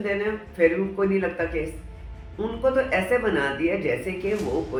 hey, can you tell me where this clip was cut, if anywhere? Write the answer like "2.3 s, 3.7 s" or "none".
none